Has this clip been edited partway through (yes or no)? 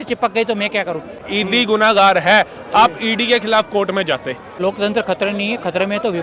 yes